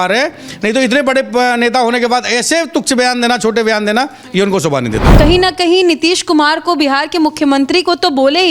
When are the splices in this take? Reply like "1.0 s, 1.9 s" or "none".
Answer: 5.0 s